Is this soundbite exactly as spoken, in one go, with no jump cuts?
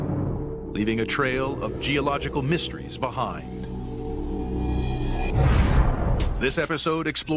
yes; 0 cuts

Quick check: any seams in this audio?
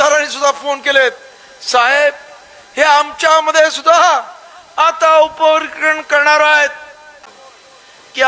yes; 1 cut; at 7.2 s

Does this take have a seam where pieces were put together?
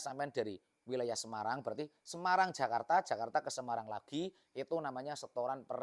no; 0 cuts

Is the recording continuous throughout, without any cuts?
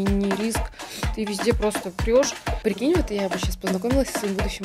no; 1 cut; at 2.4 s

